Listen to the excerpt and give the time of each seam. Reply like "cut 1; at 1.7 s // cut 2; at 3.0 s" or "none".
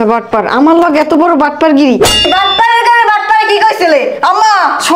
cut 1; at 2.2 s